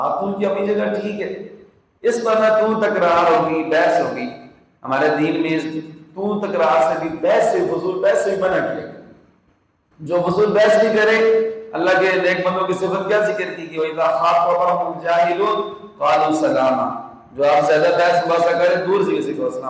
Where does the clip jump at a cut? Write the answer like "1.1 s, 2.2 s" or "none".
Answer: none